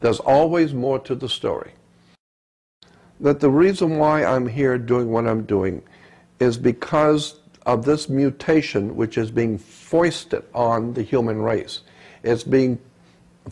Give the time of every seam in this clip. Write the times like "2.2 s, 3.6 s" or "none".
2.5 s